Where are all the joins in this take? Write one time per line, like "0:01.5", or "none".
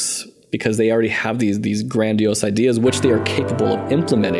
none